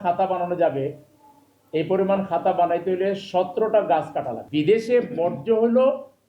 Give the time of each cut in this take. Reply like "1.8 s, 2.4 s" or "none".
4.4 s

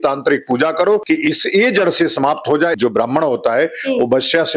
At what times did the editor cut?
1.0 s, 2.7 s

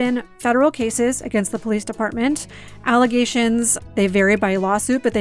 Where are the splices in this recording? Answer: 3.9 s

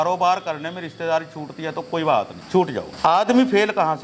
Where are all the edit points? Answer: 2.9 s

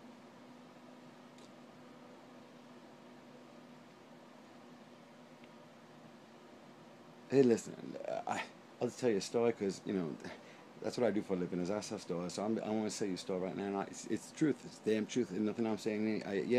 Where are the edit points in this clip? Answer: 6.1 s

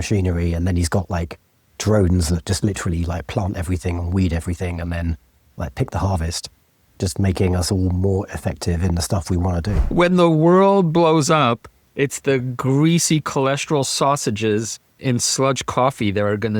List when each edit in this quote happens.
9.8 s, 15.0 s

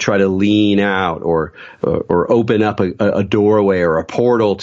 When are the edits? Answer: none

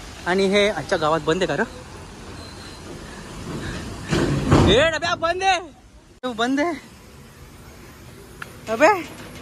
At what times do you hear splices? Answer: 6.2 s

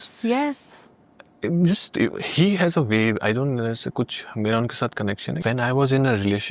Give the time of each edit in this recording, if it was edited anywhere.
5.4 s

